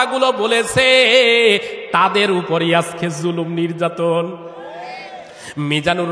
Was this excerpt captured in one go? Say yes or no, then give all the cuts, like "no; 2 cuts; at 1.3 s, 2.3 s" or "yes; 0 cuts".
yes; 0 cuts